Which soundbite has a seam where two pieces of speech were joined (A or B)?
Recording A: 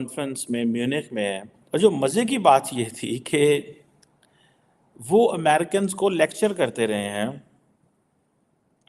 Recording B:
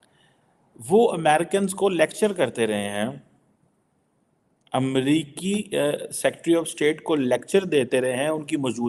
A